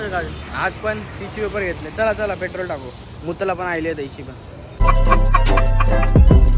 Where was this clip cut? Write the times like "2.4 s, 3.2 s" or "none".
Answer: none